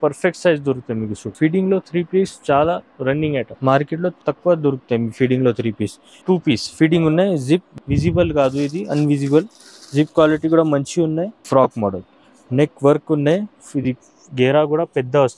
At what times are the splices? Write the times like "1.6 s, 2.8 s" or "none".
1.2 s, 3.5 s, 6.1 s, 11.4 s